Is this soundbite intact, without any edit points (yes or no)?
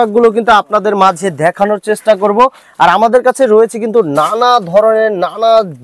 yes